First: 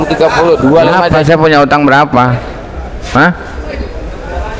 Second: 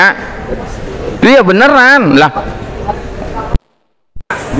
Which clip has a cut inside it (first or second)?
first